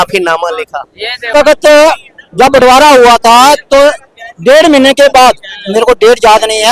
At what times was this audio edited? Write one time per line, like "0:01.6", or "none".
0:01.3